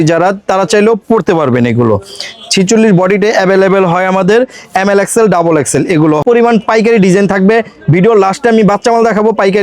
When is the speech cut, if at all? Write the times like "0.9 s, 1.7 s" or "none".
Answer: 6.2 s